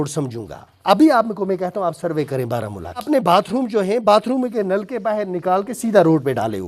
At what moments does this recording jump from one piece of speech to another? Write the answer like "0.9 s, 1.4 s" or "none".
3.1 s

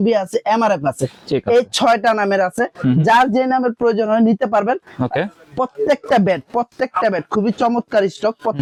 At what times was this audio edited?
none

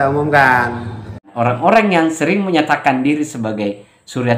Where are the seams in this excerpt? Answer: 1.3 s

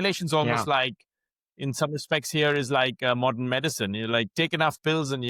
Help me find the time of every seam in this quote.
3.0 s

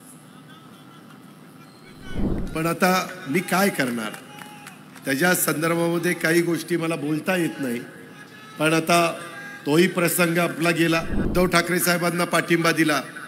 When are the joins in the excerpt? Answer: 2.3 s, 11.2 s

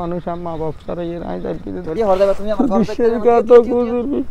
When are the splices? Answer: 1.9 s

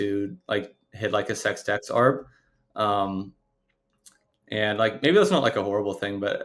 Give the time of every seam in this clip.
none

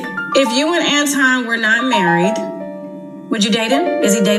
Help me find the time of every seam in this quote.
none

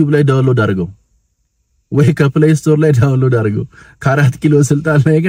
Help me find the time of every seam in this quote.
none

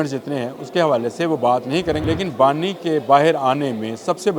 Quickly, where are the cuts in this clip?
2.0 s

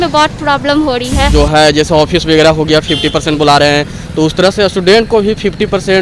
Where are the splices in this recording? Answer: 1.3 s

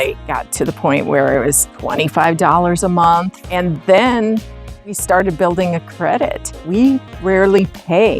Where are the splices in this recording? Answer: 7.1 s

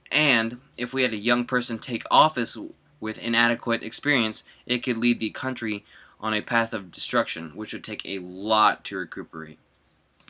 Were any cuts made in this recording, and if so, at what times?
1.2 s

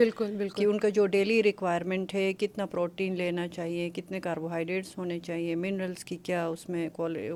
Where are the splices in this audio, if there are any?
none

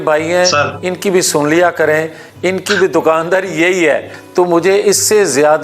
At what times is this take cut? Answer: 4.1 s

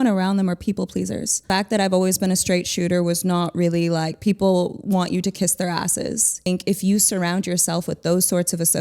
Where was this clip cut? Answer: 1.5 s, 6.5 s

